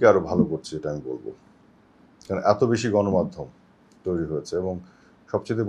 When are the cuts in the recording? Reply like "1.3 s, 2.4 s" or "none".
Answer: none